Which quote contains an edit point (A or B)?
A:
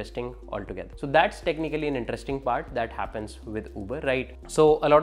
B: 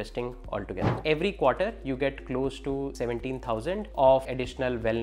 B